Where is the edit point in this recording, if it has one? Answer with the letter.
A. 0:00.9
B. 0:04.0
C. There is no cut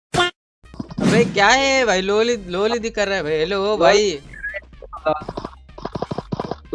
A